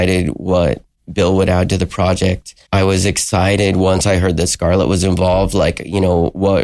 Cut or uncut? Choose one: uncut